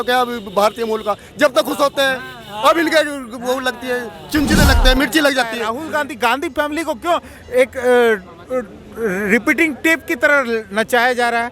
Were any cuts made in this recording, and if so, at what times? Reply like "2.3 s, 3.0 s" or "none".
5.6 s